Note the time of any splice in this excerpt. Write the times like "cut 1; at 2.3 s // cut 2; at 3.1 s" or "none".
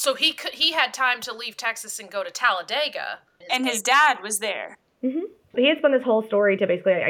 cut 1; at 3.4 s // cut 2; at 5.5 s